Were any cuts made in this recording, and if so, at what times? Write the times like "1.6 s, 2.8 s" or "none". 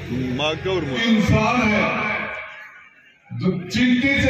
1.0 s